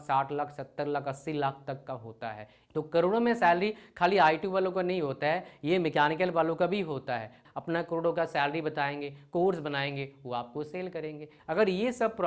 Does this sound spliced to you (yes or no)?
yes